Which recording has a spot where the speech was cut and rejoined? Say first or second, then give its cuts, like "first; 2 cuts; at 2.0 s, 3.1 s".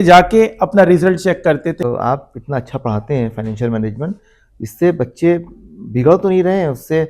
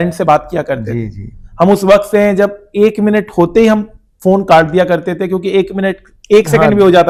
first; 1 cut; at 1.8 s